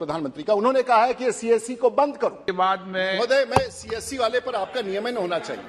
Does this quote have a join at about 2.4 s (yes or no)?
yes